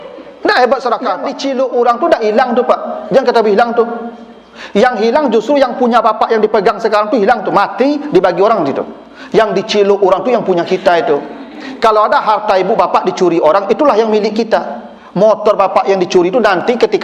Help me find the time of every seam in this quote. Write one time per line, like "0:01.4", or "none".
0:01.3